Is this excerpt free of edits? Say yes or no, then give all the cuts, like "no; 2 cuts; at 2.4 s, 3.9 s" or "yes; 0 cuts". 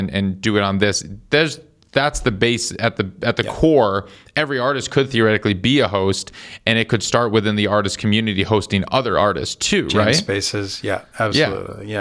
yes; 0 cuts